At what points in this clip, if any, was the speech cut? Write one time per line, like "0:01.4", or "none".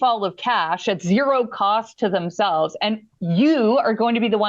none